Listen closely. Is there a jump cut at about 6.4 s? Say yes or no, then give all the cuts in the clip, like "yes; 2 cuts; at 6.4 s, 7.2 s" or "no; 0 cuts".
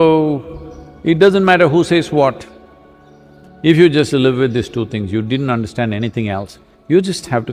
no; 0 cuts